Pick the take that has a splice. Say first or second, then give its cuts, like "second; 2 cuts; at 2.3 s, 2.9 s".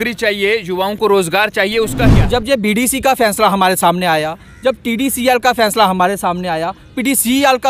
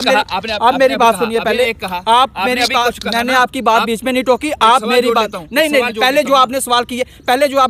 first; 1 cut; at 2.0 s